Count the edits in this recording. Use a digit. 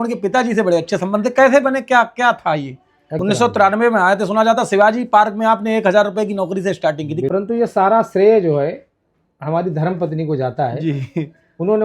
2